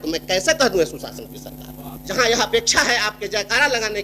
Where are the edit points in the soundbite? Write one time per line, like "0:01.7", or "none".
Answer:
0:01.9